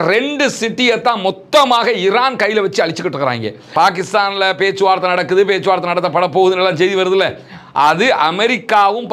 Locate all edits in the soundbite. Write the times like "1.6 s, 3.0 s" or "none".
3.7 s

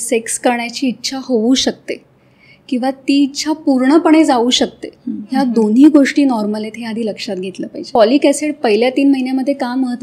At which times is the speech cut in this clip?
7.8 s

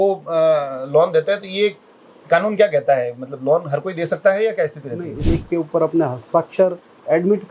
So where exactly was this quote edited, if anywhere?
5.2 s

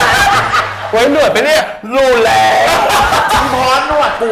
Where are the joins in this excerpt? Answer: none

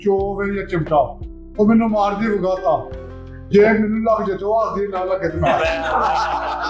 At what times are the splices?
none

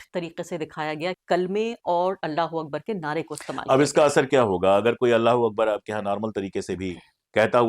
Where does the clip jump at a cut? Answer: 1.1 s

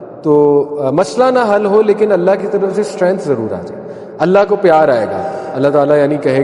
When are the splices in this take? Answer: 5.4 s

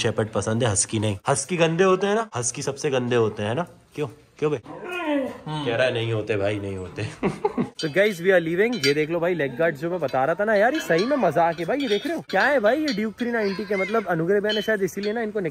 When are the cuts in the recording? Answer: none

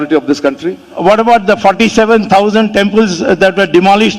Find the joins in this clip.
1.0 s

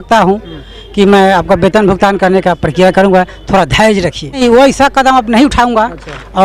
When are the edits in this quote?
4.4 s

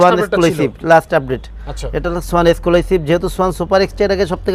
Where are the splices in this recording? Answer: none

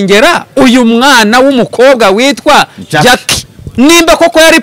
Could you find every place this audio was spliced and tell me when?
3.6 s

